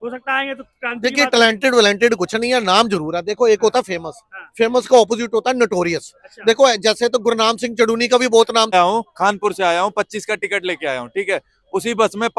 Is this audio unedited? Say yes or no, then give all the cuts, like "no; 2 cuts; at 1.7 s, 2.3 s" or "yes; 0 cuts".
no; 1 cut; at 8.7 s